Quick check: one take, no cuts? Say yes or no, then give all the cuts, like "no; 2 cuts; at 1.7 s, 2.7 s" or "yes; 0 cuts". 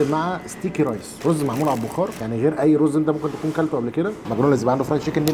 no; 2 cuts; at 2.2 s, 4.2 s